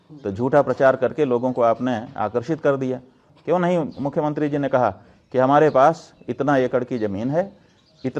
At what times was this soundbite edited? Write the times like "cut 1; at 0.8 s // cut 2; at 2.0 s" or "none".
cut 1; at 3.3 s